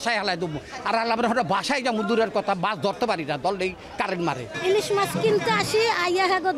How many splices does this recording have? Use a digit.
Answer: 1